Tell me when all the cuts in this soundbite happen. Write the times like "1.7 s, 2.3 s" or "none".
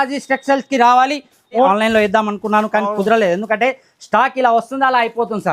1.7 s

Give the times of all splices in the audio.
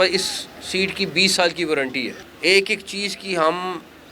2.2 s

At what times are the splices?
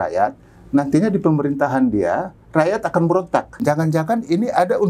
3.6 s

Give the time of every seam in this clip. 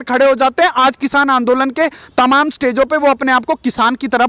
none

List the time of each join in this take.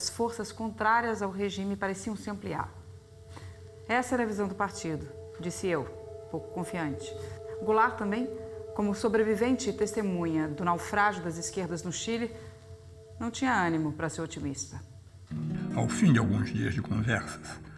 none

